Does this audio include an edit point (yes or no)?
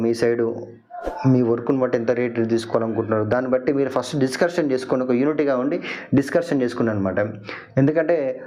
no